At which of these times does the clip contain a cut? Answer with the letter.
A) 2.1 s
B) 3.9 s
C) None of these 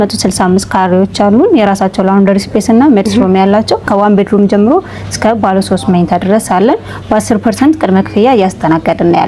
B